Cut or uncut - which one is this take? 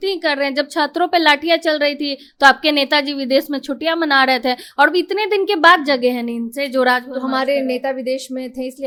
uncut